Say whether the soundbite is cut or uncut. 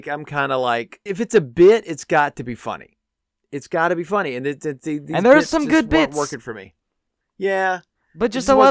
cut